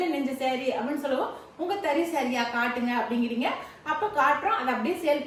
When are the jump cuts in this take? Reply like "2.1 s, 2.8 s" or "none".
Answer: none